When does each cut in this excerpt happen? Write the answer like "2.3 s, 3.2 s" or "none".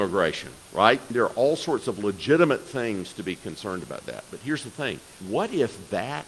1.1 s, 5.1 s